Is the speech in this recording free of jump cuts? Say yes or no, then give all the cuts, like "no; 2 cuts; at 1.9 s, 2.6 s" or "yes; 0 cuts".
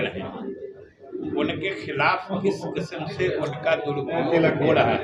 yes; 0 cuts